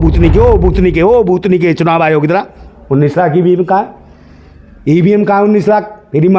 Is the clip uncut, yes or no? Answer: yes